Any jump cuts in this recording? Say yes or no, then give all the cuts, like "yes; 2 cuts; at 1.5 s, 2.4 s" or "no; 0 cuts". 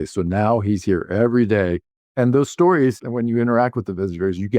yes; 2 cuts; at 2.1 s, 3.0 s